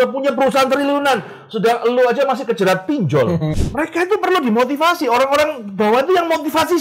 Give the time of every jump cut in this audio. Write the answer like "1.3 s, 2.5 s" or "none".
3.6 s